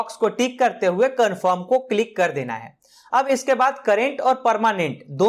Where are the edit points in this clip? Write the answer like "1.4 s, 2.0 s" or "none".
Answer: none